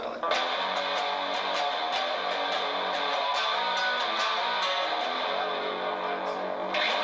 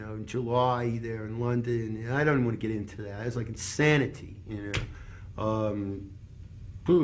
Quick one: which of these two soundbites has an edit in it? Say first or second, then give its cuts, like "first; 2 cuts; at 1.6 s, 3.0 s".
second; 1 cut; at 1.0 s